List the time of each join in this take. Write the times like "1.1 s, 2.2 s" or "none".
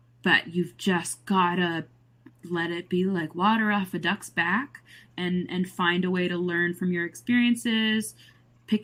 none